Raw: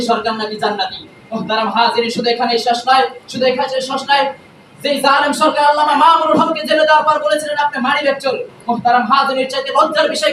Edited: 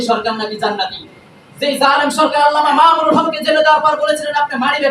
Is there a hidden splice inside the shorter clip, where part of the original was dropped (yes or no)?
yes